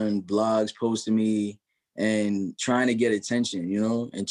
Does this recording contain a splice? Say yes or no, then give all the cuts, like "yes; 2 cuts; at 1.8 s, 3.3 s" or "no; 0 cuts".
no; 0 cuts